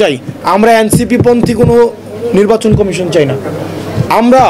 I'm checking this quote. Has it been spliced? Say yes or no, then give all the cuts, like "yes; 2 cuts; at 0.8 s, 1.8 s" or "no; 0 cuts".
no; 0 cuts